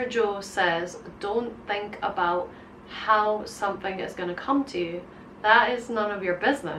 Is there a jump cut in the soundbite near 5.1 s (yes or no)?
no